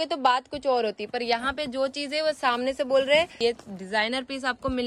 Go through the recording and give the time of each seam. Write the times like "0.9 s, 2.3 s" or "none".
3.4 s